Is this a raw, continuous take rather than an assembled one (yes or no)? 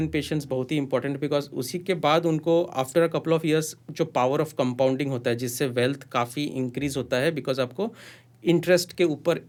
yes